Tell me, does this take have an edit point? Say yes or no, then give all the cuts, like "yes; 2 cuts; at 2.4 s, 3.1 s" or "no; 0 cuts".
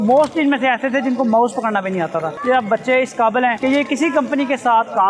yes; 2 cuts; at 2.3 s, 3.6 s